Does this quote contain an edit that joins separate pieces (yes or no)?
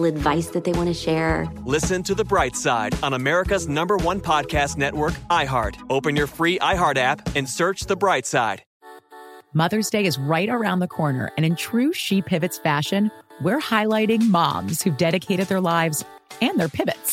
yes